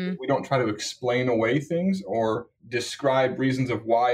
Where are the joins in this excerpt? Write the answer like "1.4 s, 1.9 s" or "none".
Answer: 2.6 s